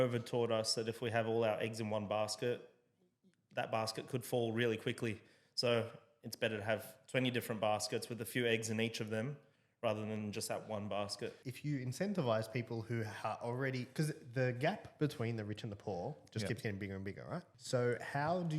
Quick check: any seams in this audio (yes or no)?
yes